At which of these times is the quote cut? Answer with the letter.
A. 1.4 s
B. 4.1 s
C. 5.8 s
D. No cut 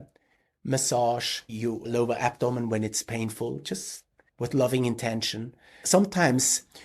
C